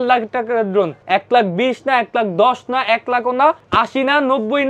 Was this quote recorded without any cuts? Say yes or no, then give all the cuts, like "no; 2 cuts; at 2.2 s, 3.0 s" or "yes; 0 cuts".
no; 2 cuts; at 1.0 s, 3.6 s